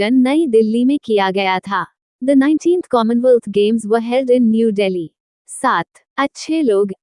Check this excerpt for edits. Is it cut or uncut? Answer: cut